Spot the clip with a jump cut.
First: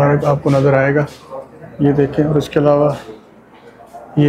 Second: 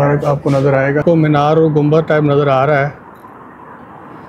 second; 1 cut; at 1.0 s

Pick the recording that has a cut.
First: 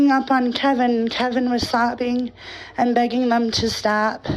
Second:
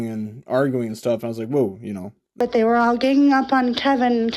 second; 1 cut; at 2.2 s

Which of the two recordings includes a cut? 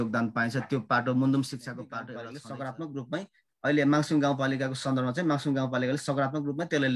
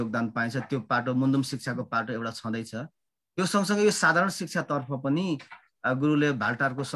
first; 1 cut; at 2.0 s

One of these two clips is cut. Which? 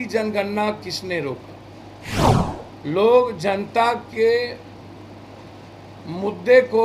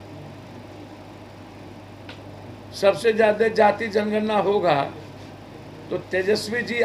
first; 1 cut; at 2.3 s

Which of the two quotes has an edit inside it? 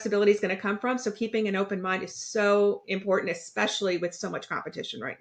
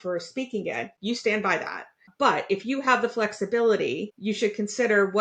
second; 2 cuts; at 0.9 s, 4.1 s

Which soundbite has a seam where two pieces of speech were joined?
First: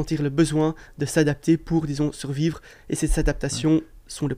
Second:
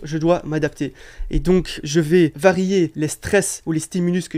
second; 2 cuts; at 1.8 s, 3.3 s

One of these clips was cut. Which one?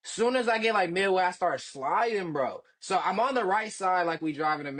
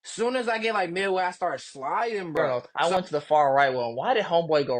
second; 1 cut; at 2.7 s

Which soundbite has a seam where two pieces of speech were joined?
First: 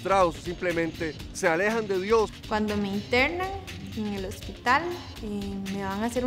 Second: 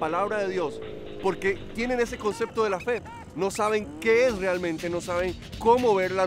first; 1 cut; at 2.4 s

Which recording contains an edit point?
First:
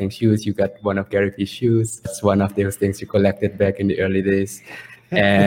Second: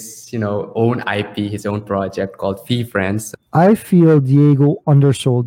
second; 1 cut; at 3.2 s

